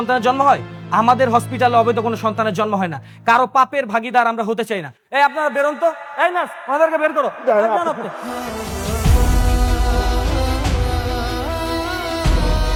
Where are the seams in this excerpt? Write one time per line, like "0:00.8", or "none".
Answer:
none